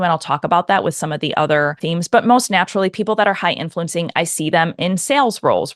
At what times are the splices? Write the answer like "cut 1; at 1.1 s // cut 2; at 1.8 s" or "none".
cut 1; at 1.8 s